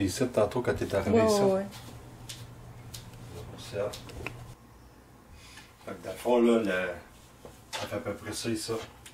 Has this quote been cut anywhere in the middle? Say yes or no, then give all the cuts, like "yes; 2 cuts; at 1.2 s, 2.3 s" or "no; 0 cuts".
no; 0 cuts